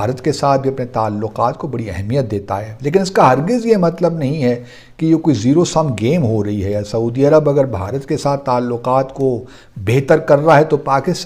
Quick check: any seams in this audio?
no; 0 cuts

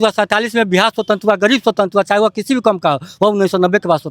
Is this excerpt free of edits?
yes; 0 cuts

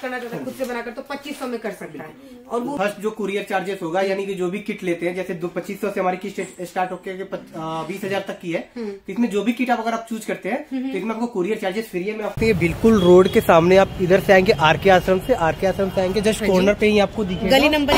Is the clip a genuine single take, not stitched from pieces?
no; 2 cuts; at 2.8 s, 12.3 s

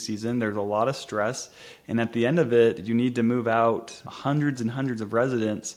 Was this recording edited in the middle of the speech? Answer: no; 0 cuts

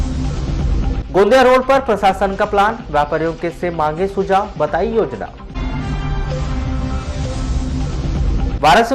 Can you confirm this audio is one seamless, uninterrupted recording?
yes; 0 cuts

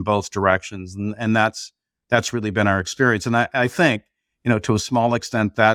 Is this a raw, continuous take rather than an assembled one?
yes; 0 cuts

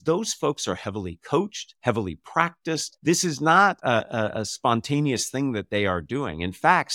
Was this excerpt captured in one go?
yes; 0 cuts

